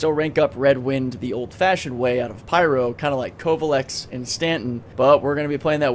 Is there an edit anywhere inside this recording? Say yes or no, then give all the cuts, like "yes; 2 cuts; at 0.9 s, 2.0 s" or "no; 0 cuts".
yes; 1 cut; at 4.8 s